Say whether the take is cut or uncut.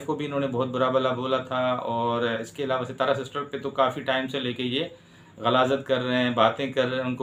uncut